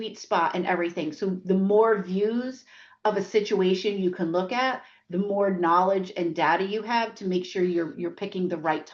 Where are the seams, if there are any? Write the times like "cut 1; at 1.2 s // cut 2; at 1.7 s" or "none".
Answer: none